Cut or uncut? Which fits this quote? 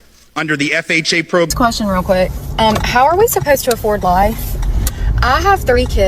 cut